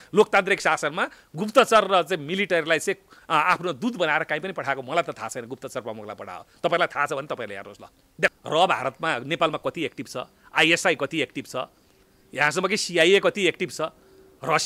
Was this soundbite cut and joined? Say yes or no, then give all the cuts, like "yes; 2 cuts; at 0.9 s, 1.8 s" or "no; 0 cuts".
yes; 1 cut; at 8.3 s